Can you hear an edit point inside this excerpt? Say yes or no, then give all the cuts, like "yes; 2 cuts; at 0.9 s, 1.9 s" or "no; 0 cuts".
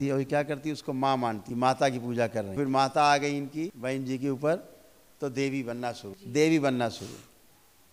yes; 4 cuts; at 1.4 s, 2.6 s, 3.8 s, 6.1 s